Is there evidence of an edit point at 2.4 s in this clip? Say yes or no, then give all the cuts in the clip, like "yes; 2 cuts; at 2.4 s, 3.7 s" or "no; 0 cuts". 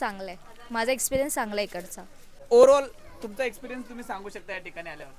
yes; 1 cut; at 2.4 s